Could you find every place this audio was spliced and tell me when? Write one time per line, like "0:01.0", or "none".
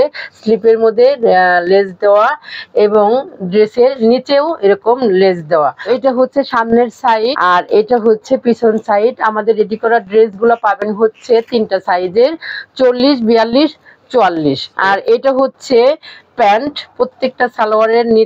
0:05.9
0:07.4
0:14.7
0:16.9